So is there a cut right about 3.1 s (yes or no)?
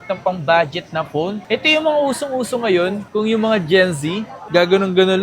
no